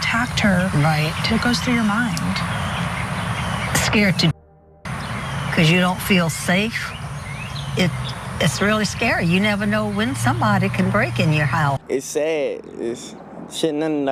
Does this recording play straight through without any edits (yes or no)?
no